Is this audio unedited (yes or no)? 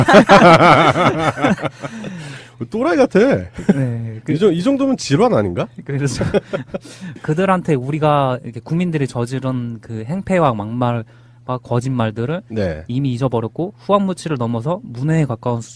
yes